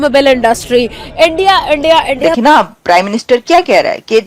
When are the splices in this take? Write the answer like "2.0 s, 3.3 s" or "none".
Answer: 2.4 s